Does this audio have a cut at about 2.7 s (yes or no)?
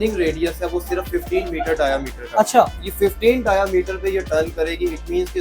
no